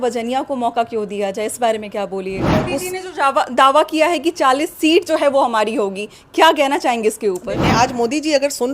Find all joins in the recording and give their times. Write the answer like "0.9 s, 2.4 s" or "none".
2.4 s, 7.5 s